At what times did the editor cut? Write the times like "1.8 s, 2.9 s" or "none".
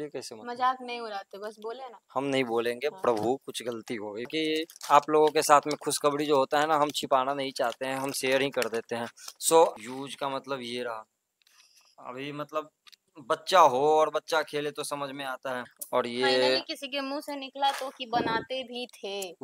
4.3 s, 9.7 s, 15.8 s